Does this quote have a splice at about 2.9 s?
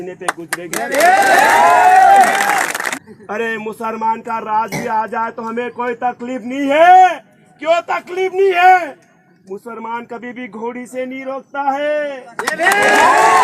yes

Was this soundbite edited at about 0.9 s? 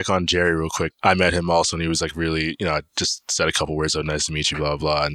yes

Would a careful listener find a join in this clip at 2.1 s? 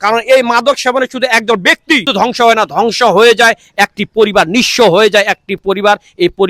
yes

